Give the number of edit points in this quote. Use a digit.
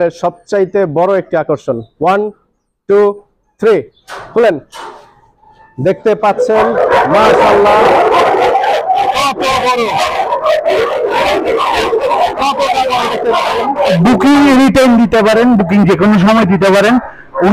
1